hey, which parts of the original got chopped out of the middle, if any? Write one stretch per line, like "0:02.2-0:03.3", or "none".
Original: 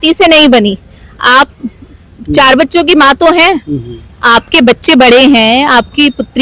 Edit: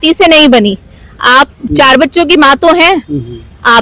0:01.6-0:02.2